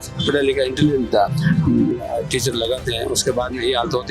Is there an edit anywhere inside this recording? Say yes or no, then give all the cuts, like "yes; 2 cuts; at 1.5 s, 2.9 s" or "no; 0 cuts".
yes; 1 cut; at 1.3 s